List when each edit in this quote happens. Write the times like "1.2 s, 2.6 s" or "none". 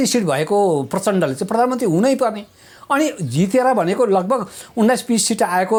none